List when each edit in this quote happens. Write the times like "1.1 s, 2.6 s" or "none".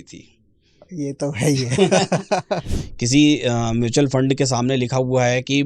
2.7 s